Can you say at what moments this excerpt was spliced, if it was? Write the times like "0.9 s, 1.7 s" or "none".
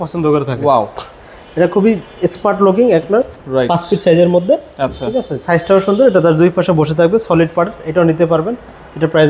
none